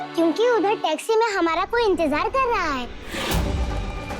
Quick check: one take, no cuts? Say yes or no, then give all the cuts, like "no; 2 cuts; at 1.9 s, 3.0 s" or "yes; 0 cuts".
no; 1 cut; at 3.0 s